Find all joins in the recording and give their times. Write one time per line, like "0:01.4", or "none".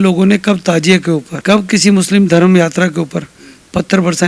0:01.3